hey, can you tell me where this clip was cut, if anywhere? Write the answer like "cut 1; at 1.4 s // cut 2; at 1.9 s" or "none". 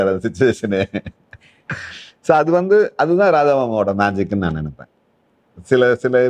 none